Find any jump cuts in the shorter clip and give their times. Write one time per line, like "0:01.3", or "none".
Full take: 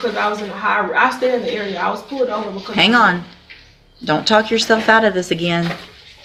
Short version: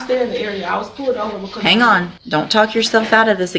0:02.2

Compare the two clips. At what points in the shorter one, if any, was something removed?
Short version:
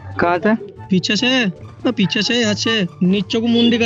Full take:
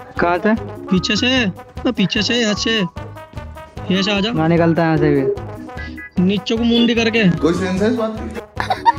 0:02.9

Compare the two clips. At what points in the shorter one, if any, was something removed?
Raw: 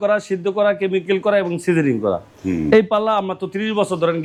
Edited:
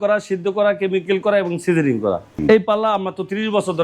0:02.4

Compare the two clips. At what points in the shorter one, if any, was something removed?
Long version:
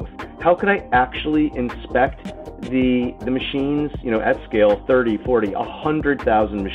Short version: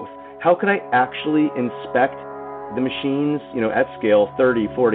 0:02.6

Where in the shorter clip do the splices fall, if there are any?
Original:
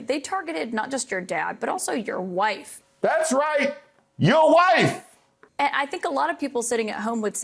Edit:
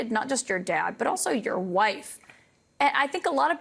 0:02.2

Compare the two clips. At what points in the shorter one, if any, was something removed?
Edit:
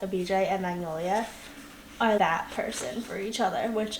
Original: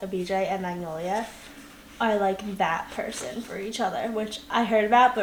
0:02.2

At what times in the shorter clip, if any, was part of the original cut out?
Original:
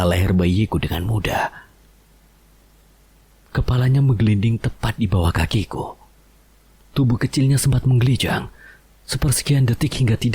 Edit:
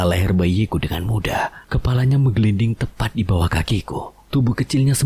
0:01.6
0:04.2

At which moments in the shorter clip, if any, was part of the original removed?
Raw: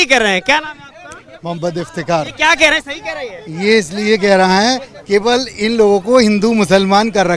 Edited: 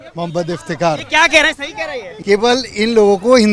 0:02.1

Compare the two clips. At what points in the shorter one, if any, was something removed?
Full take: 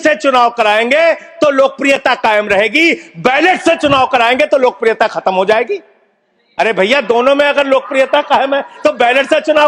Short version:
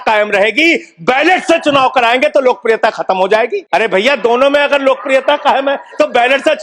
0:03.6

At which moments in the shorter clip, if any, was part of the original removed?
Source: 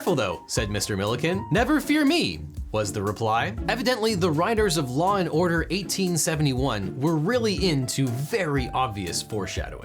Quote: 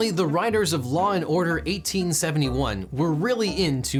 none

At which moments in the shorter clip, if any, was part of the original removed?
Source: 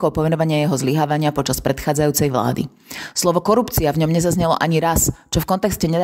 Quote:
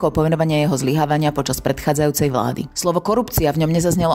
0:02.7

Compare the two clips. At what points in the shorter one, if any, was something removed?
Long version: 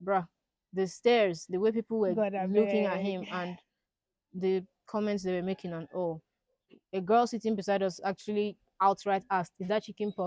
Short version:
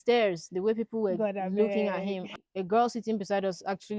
0:02.3

